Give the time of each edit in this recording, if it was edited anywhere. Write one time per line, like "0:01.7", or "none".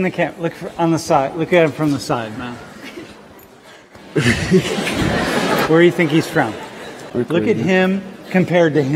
0:07.0

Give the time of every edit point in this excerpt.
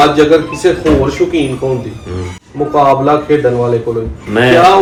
none

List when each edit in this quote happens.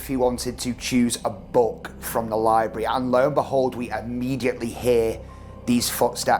none

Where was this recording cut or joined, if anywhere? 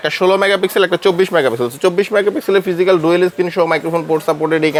none

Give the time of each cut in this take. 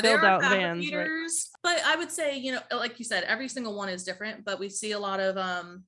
0:01.5

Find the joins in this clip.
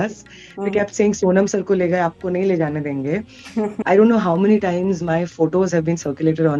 0:03.8

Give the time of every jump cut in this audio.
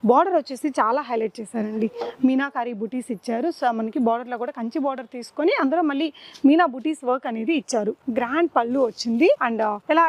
none

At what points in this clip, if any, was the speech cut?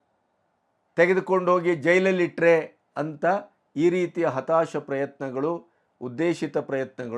none

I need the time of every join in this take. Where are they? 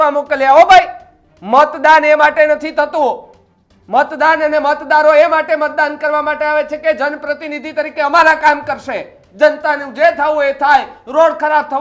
0:09.2

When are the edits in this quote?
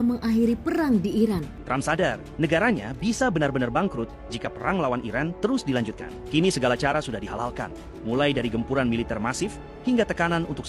0:01.6

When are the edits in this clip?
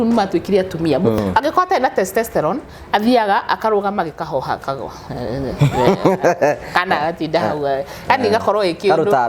0:01.2

